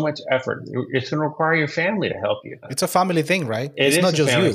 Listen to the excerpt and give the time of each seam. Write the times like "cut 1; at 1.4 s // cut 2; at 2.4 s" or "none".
cut 1; at 2.7 s